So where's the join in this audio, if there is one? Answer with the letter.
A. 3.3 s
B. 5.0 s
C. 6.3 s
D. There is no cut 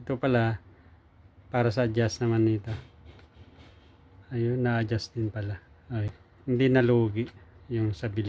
C